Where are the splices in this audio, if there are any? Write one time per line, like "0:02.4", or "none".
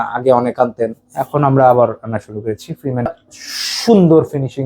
0:03.1